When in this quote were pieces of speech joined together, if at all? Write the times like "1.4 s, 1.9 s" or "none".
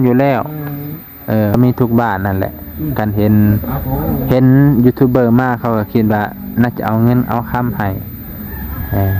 1.5 s